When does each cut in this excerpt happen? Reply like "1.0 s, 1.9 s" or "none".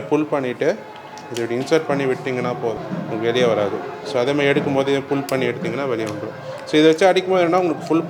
none